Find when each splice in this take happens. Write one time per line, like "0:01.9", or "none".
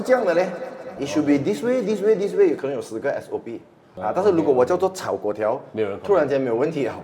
0:00.9
0:03.9